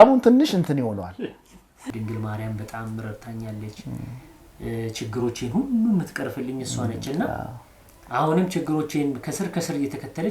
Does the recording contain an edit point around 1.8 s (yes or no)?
yes